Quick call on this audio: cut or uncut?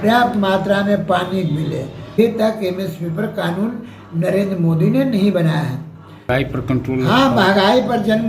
cut